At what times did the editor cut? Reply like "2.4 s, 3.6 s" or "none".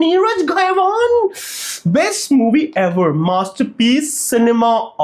none